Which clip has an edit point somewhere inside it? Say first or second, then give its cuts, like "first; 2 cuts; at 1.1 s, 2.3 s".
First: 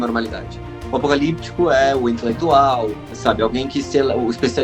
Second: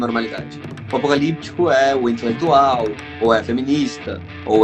first; 1 cut; at 3.1 s